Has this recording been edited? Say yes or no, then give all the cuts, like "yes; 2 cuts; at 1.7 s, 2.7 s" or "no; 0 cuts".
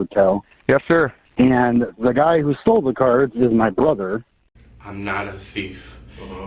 yes; 2 cuts; at 1.2 s, 4.3 s